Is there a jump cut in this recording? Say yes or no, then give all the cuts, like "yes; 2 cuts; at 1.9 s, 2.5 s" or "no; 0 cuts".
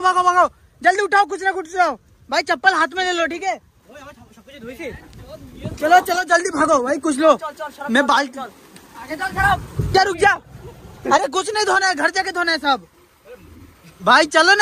no; 0 cuts